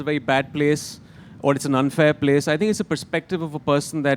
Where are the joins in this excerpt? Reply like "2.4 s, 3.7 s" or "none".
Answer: none